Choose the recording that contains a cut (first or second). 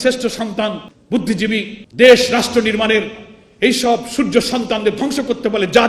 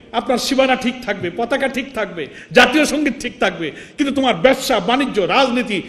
first